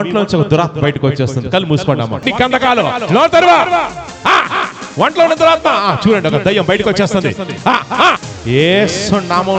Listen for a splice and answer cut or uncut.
cut